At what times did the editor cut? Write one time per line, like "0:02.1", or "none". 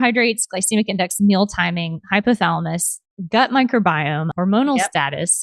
0:04.3